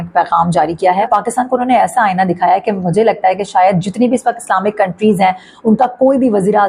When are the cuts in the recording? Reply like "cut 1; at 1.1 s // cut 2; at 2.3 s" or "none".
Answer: cut 1; at 1.1 s